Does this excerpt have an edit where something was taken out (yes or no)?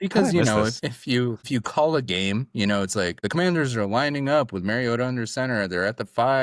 yes